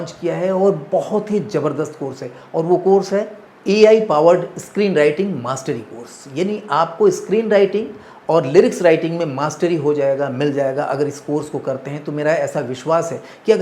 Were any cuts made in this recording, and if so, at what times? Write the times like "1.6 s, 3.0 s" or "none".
none